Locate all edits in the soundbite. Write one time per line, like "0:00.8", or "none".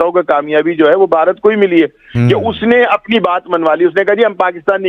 none